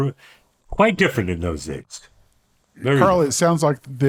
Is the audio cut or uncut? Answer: uncut